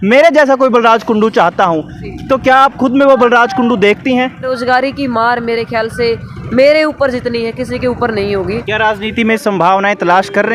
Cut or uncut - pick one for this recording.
cut